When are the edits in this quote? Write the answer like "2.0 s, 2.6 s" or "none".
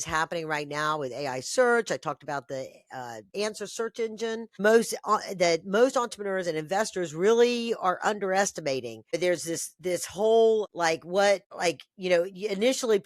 3.3 s, 4.6 s, 9.1 s, 10.7 s, 11.5 s